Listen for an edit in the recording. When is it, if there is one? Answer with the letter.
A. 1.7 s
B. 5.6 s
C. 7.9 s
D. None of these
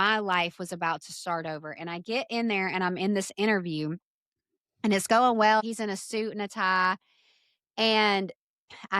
B